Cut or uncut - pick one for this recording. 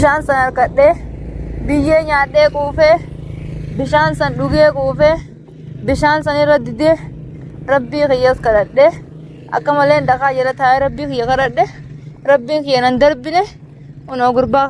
uncut